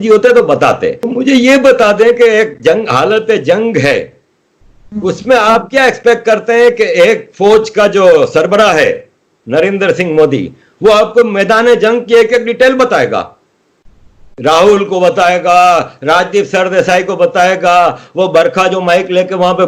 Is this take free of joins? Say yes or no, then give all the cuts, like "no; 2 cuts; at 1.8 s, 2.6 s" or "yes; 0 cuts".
no; 1 cut; at 1.0 s